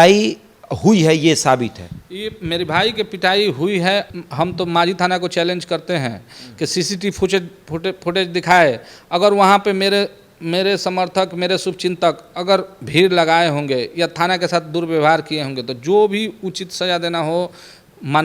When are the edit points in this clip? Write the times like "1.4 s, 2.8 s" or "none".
4.1 s